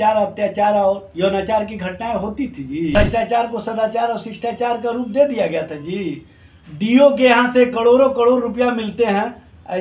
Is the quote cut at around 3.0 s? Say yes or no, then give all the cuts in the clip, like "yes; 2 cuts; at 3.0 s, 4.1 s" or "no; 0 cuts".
yes; 1 cut; at 3.0 s